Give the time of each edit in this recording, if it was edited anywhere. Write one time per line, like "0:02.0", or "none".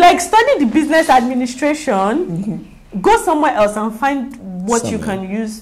none